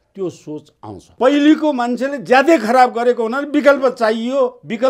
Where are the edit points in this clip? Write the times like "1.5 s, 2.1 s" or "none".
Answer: 1.1 s